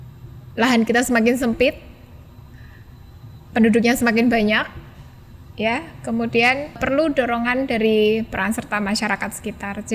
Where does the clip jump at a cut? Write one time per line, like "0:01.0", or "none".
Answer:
0:06.8